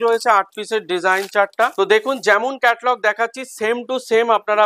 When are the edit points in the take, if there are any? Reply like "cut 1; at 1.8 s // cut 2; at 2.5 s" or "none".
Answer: cut 1; at 1.7 s